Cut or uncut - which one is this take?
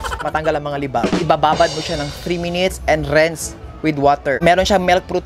uncut